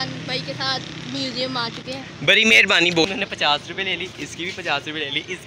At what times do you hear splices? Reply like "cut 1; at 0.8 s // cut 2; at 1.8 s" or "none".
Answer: cut 1; at 3.0 s